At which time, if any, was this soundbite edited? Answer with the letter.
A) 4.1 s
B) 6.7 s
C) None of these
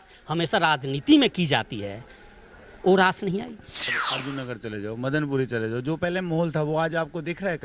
A